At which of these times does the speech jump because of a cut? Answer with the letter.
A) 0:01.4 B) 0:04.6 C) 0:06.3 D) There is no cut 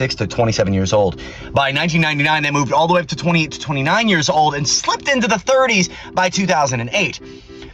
D